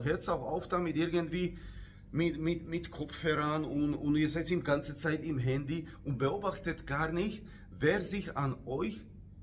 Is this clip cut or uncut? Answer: uncut